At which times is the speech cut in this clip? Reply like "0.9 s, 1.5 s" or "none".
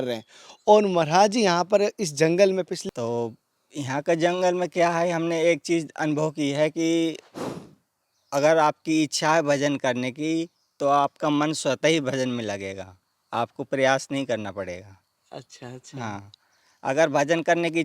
2.8 s